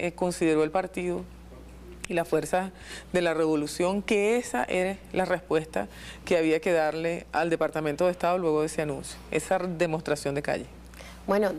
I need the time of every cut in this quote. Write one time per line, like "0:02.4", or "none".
none